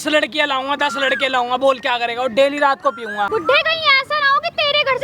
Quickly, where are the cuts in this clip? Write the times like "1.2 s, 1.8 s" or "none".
3.3 s